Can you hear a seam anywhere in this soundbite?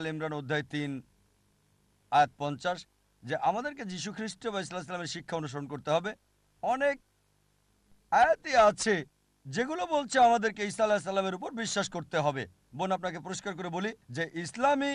yes; 1 cut; at 14.0 s

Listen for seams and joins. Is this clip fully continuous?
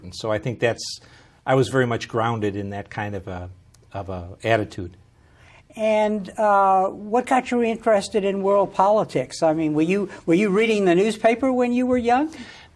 no; 1 cut; at 6.2 s

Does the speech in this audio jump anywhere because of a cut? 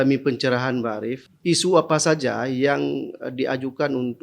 yes; 1 cut; at 1.2 s

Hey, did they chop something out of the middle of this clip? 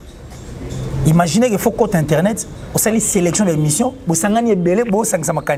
no; 0 cuts

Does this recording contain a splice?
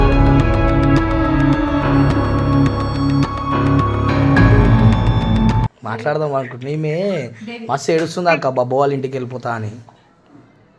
yes; 1 cut; at 5.7 s

